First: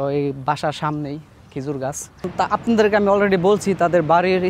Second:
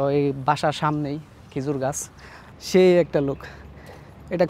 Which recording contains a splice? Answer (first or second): second